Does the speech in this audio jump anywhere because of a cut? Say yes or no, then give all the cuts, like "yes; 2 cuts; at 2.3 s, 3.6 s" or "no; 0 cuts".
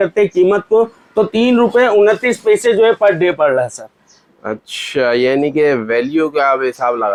no; 0 cuts